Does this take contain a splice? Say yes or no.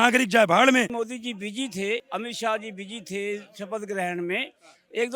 yes